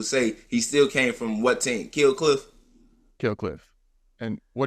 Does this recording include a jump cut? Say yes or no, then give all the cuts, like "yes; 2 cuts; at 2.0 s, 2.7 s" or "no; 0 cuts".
no; 0 cuts